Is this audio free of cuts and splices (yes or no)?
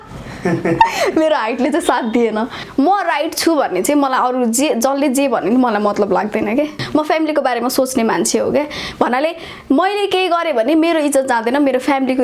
no